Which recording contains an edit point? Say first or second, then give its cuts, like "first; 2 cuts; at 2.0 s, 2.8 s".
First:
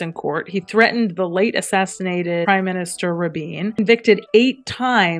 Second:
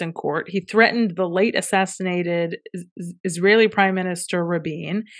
first; 2 cuts; at 2.4 s, 3.8 s